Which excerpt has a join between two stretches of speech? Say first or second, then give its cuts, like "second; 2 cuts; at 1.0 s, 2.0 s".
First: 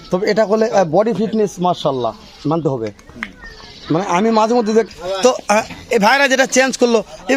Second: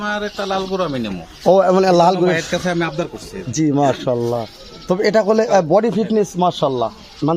first; 1 cut; at 4.9 s